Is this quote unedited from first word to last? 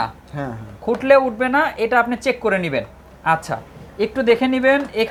yes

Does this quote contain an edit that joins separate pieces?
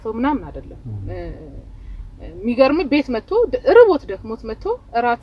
no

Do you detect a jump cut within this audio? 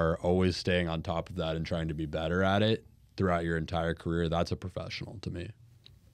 no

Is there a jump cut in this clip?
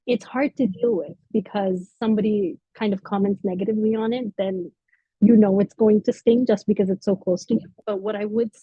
yes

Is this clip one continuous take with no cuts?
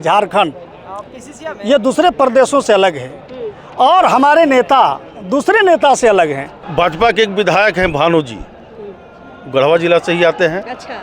no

